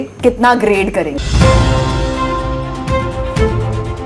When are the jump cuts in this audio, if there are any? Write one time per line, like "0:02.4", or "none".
0:01.2